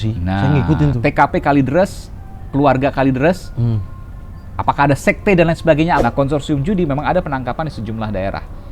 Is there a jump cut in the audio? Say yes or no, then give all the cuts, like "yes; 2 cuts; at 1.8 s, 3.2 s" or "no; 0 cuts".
yes; 1 cut; at 6.0 s